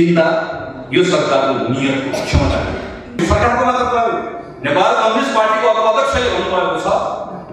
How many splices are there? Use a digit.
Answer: 1